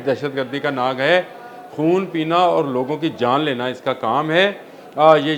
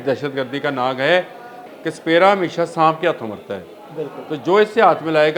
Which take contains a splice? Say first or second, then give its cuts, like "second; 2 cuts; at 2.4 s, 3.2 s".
second; 1 cut; at 1.6 s